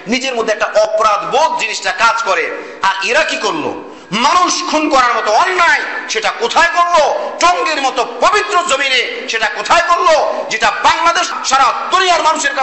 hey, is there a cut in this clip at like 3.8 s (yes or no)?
no